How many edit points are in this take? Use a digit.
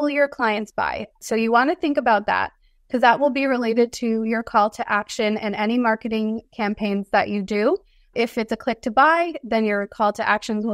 1